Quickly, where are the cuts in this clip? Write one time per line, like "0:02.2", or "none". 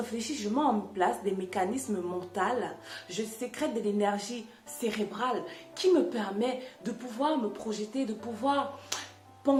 none

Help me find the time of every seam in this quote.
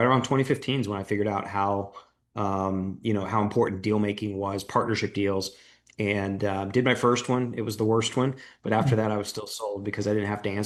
none

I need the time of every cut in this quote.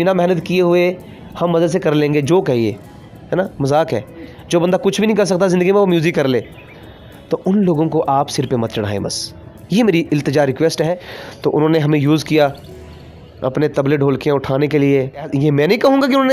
0:10.8
0:15.3

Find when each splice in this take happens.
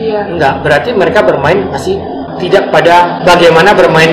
0:02.3
0:03.2

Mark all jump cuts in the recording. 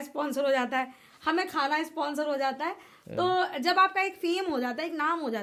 none

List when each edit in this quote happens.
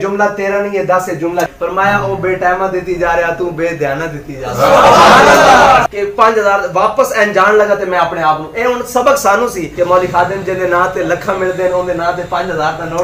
0:01.5
0:05.9
0:09.6

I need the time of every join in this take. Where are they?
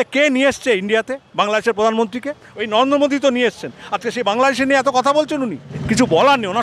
0:05.7

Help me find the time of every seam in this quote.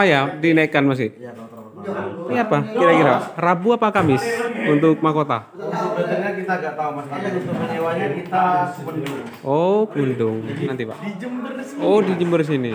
0:02.3
0:10.7

